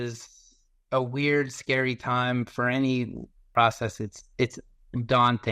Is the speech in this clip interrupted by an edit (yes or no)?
yes